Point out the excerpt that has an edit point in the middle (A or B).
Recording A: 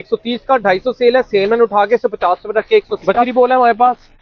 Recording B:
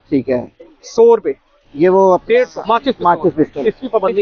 A